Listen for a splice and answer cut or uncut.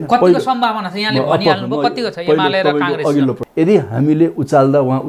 cut